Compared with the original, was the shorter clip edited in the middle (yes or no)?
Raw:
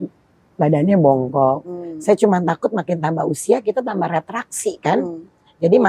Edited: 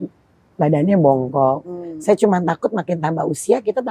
no